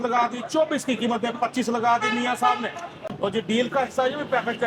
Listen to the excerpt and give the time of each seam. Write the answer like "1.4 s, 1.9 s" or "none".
3.0 s